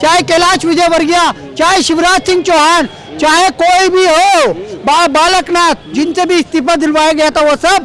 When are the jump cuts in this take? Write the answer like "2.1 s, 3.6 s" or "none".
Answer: none

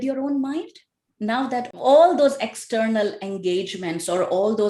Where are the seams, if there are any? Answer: none

